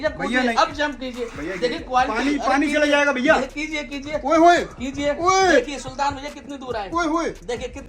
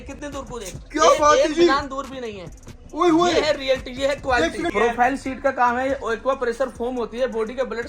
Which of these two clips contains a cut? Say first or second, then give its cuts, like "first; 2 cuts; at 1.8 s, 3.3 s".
second; 1 cut; at 4.7 s